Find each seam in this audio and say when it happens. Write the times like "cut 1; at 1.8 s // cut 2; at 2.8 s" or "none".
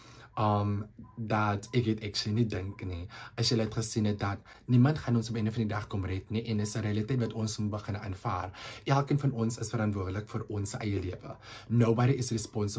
none